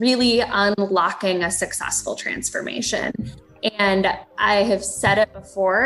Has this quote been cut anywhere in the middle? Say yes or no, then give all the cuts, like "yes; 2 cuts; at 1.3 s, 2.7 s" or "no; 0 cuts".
no; 0 cuts